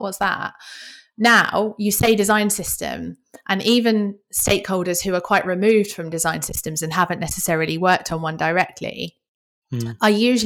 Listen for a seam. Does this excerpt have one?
no; 0 cuts

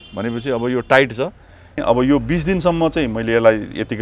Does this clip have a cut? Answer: yes; 1 cut; at 1.8 s

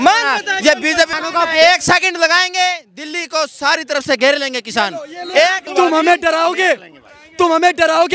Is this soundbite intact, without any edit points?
no; 2 cuts; at 1.1 s, 5.6 s

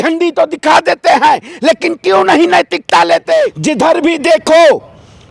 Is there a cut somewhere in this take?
yes; 1 cut; at 3.5 s

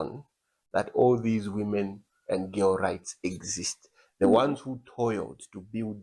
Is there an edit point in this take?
no; 0 cuts

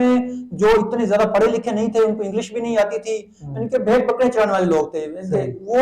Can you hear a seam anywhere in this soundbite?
no; 0 cuts

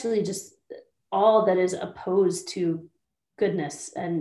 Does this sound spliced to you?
no; 0 cuts

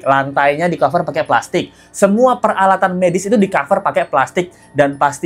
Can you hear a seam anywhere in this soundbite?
no; 0 cuts

